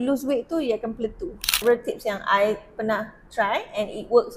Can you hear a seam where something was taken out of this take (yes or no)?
yes